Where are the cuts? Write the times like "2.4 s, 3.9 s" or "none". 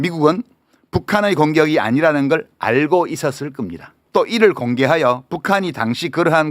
4.0 s